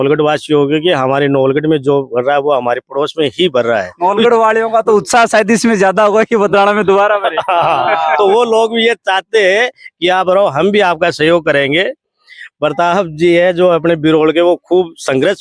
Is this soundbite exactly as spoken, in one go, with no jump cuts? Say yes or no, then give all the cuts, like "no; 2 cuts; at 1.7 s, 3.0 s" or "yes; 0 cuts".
yes; 0 cuts